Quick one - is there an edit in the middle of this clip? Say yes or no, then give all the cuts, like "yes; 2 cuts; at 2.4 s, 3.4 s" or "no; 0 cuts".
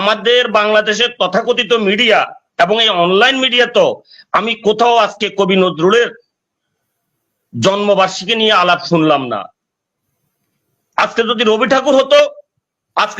no; 0 cuts